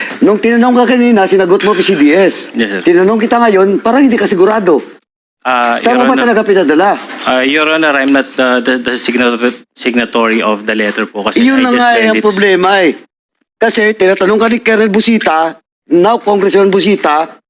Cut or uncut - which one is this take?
uncut